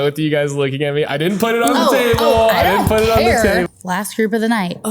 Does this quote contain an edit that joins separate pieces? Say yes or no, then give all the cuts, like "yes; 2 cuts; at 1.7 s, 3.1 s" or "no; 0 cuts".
yes; 1 cut; at 3.7 s